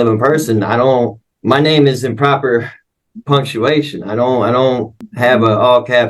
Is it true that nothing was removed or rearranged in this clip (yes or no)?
no